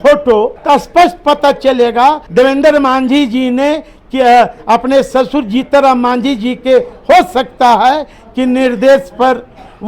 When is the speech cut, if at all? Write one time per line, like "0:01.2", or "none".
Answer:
0:02.2